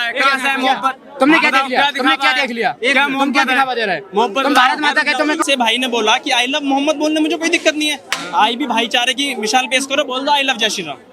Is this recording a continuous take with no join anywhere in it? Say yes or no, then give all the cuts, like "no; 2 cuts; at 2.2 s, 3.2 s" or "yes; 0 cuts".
no; 1 cut; at 5.5 s